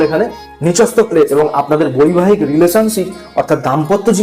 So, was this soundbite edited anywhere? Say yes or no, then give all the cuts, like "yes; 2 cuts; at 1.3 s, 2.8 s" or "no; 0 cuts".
yes; 1 cut; at 1.3 s